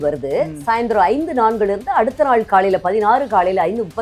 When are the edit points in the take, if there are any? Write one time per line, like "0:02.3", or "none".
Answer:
none